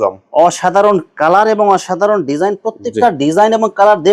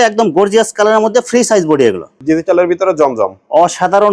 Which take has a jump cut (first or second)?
second